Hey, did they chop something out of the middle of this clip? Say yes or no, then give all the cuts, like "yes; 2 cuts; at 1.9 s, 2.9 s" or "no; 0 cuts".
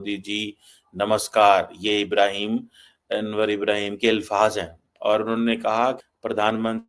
yes; 2 cuts; at 4.8 s, 6.0 s